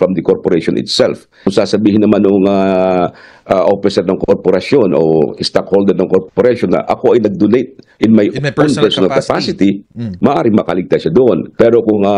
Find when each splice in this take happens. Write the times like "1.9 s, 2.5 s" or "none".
none